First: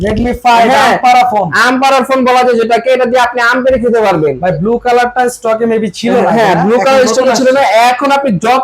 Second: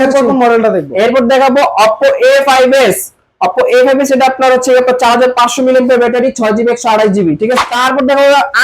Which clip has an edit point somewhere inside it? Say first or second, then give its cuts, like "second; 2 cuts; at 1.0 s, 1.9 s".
second; 1 cut; at 7.6 s